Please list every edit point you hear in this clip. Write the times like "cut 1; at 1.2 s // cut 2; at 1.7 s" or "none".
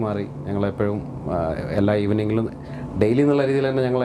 none